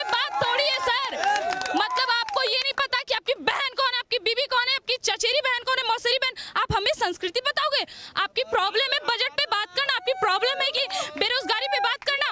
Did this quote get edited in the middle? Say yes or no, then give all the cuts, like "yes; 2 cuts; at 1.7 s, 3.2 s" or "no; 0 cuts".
no; 0 cuts